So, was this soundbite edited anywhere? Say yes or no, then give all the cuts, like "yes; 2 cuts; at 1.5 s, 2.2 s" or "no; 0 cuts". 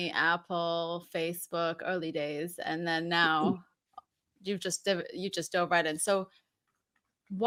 no; 0 cuts